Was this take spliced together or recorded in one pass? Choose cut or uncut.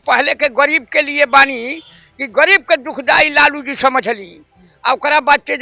uncut